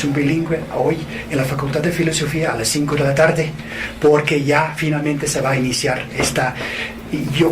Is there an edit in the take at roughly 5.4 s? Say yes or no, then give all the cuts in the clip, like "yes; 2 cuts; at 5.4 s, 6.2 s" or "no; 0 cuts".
no; 1 cut; at 3.4 s